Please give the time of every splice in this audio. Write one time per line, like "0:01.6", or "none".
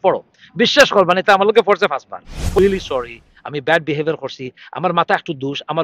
0:02.6